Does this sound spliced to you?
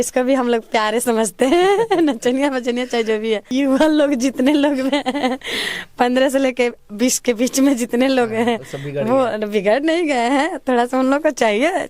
yes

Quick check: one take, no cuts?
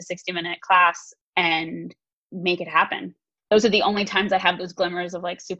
no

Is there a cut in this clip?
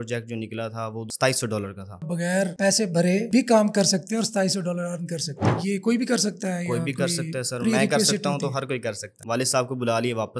yes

